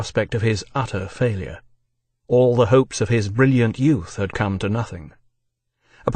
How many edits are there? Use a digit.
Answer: 0